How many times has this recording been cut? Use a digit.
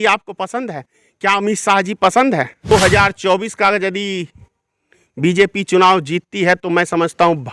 1